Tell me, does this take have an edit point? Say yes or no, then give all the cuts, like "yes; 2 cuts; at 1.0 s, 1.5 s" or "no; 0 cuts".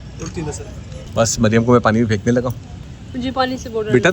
yes; 2 cuts; at 1.0 s, 2.6 s